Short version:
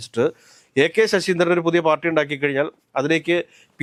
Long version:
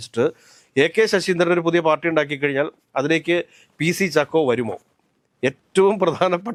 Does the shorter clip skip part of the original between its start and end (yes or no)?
no